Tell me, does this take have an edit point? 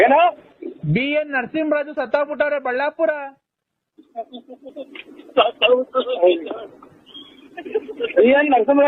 no; 0 cuts

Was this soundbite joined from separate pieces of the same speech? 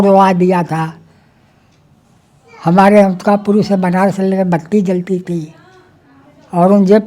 no; 0 cuts

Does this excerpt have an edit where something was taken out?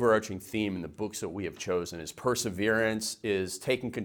no; 0 cuts

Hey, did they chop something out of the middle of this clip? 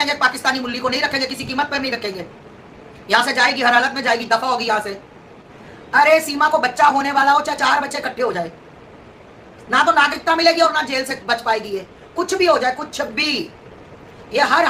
no; 0 cuts

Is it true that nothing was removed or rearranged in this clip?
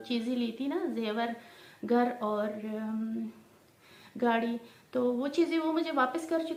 yes; 0 cuts

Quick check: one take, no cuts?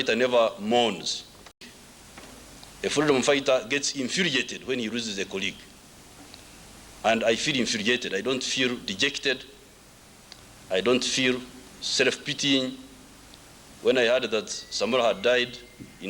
no; 1 cut; at 1.5 s

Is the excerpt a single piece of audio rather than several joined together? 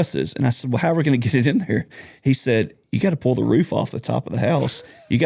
yes; 0 cuts

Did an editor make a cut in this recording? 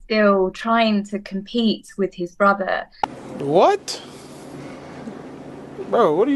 yes; 1 cut; at 2.9 s

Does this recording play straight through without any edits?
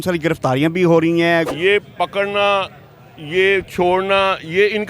no; 1 cut; at 1.5 s

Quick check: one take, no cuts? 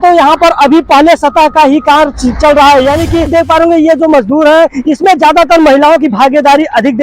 no; 1 cut; at 3.3 s

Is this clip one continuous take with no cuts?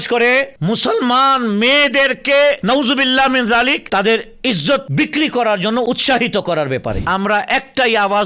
no; 1 cut; at 7.0 s

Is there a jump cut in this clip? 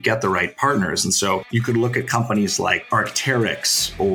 yes; 2 cuts; at 1.5 s, 2.8 s

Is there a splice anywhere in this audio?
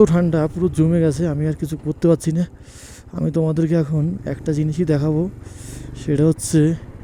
no; 0 cuts

